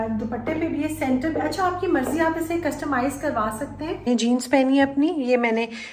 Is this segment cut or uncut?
cut